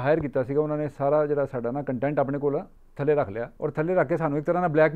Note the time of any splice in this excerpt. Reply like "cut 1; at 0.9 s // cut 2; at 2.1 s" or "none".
cut 1; at 2.8 s // cut 2; at 3.5 s